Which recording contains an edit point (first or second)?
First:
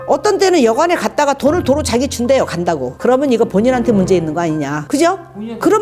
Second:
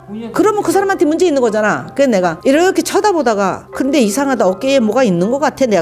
first